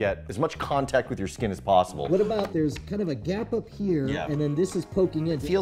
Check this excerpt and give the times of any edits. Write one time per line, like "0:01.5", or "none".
none